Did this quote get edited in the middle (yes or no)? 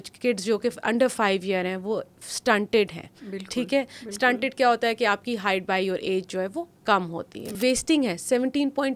yes